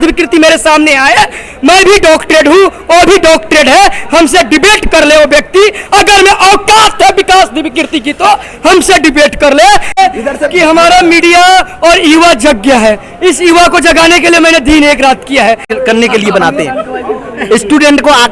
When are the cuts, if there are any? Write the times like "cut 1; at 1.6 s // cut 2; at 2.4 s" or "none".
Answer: cut 1; at 10.0 s // cut 2; at 15.7 s

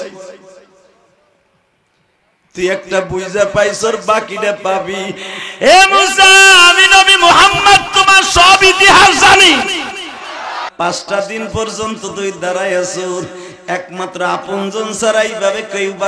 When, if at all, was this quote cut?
cut 1; at 10.7 s

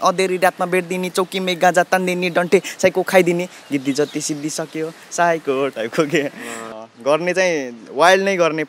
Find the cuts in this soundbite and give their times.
cut 1; at 6.6 s

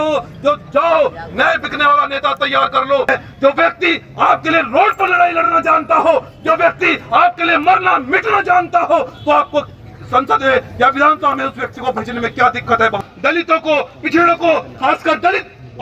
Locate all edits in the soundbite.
cut 1; at 3.1 s // cut 2; at 13.0 s

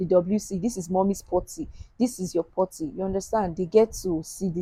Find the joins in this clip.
none

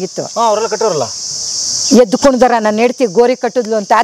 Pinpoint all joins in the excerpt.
none

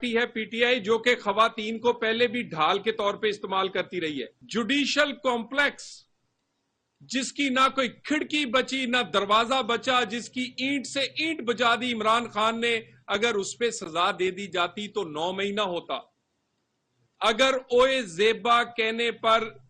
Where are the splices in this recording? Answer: cut 1; at 4.4 s

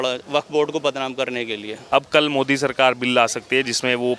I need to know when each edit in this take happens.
cut 1; at 1.7 s

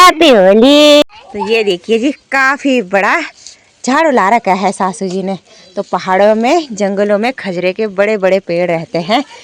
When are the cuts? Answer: cut 1; at 1.0 s

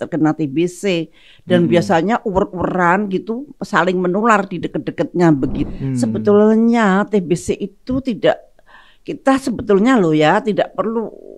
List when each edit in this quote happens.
cut 1; at 5.6 s

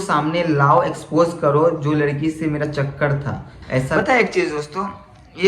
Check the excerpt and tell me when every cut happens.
cut 1; at 3.9 s

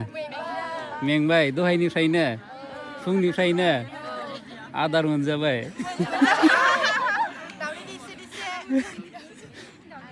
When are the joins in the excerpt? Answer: none

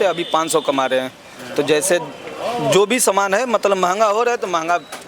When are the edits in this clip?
none

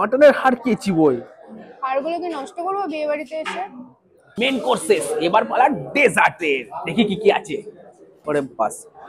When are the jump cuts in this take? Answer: none

